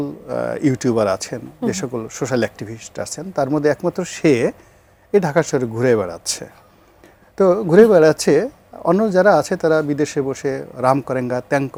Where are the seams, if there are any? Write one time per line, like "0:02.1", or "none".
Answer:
none